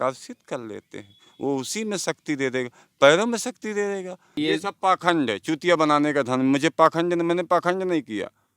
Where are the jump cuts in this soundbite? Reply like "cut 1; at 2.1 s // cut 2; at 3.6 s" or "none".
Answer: cut 1; at 4.4 s